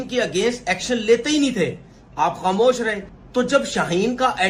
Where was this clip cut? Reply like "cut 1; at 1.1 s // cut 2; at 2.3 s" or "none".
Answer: cut 1; at 3.1 s